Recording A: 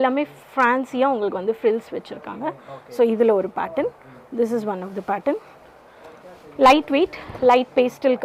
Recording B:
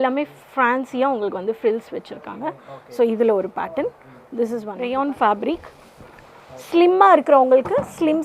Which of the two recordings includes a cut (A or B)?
B